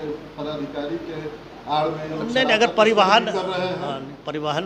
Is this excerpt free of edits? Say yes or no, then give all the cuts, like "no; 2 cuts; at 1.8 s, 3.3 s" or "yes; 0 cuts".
yes; 0 cuts